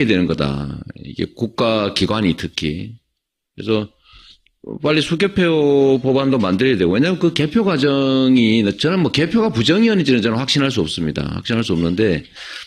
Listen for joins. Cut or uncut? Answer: uncut